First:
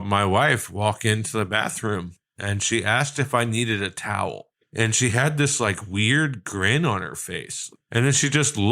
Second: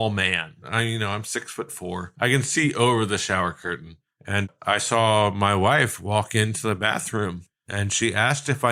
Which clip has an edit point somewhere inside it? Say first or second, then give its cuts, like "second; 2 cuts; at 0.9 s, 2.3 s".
first; 2 cuts; at 4.5 s, 7.7 s